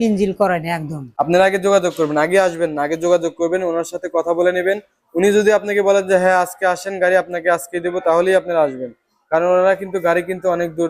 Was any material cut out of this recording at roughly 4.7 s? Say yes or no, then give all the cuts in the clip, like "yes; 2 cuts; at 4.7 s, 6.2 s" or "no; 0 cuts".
no; 1 cut; at 1.0 s